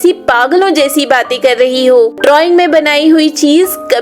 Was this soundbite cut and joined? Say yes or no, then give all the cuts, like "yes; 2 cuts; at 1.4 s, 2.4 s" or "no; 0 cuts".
no; 0 cuts